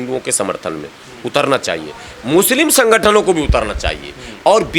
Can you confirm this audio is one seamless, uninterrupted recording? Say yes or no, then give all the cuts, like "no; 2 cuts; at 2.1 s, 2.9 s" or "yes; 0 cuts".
yes; 0 cuts